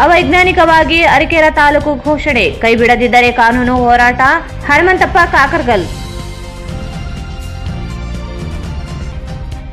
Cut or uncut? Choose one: uncut